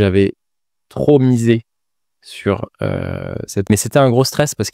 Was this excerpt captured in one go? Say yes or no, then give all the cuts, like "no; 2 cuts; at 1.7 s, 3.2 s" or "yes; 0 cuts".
no; 1 cut; at 3.7 s